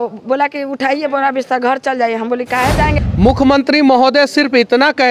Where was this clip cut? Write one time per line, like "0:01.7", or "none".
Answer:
0:03.0

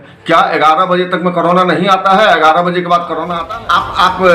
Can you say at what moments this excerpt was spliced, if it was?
0:03.3

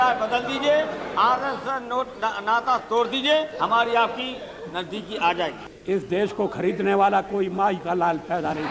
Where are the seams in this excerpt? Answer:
0:05.7

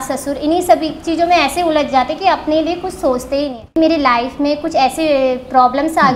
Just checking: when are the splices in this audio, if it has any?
0:03.7

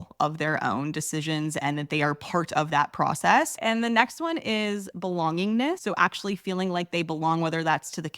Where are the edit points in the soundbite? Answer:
0:03.6
0:05.8

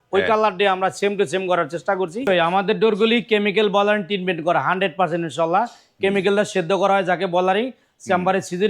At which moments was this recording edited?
0:02.3

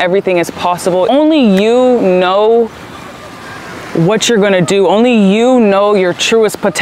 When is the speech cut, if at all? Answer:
0:01.1

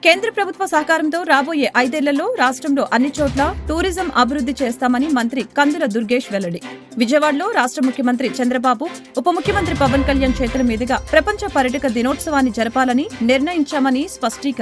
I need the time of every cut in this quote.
none

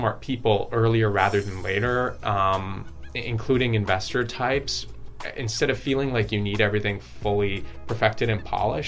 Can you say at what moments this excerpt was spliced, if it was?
none

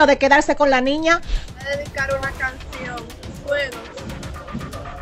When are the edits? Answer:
0:01.3

